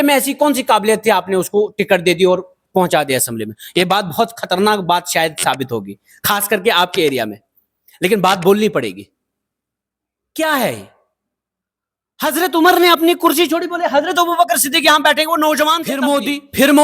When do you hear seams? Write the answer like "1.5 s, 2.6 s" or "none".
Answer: 15.9 s